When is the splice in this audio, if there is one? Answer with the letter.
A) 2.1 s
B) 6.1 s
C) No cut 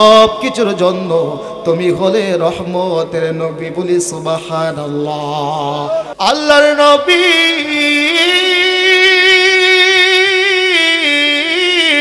B